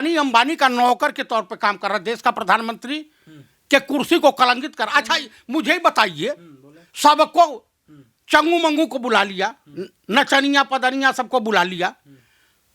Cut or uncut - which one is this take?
uncut